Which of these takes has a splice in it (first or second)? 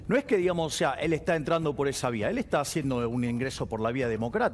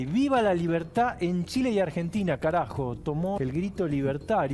second